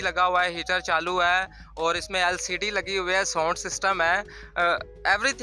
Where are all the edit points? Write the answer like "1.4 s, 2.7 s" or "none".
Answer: none